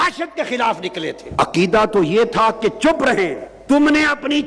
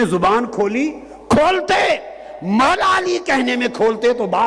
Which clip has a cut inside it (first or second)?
first